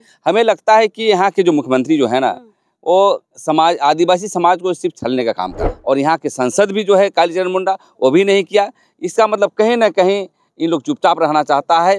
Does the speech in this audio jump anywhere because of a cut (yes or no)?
yes